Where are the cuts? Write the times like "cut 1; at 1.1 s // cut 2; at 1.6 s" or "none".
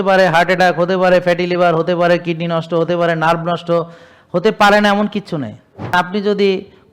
cut 1; at 5.9 s